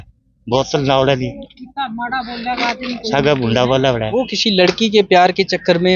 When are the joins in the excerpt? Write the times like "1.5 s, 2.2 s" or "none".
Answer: 4.1 s